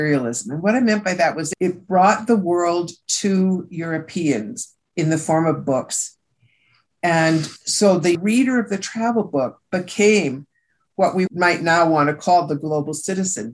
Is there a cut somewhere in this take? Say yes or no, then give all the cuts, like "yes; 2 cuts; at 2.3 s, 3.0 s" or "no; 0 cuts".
yes; 1 cut; at 8.2 s